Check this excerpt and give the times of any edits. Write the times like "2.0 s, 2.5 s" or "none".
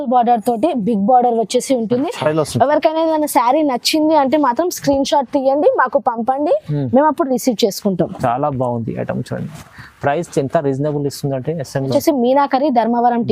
2.2 s, 11.9 s